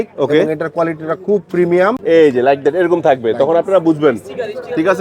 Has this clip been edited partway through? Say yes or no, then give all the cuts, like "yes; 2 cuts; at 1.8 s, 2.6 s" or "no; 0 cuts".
yes; 1 cut; at 2.0 s